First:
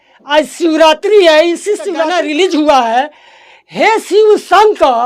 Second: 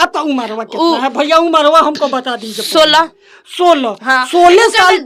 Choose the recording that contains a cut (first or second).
first